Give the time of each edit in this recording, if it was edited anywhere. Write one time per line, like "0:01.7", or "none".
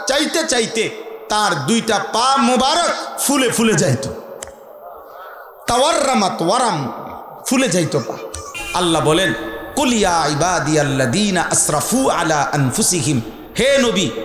0:08.5